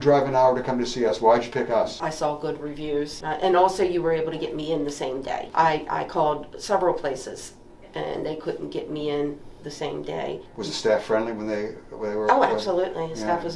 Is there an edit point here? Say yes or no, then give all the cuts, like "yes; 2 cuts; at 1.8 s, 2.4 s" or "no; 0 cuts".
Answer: yes; 4 cuts; at 2.0 s, 3.2 s, 5.5 s, 10.5 s